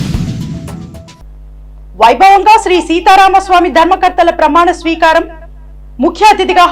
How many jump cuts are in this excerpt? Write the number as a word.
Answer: one